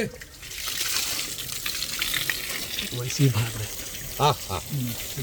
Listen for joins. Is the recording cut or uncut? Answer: uncut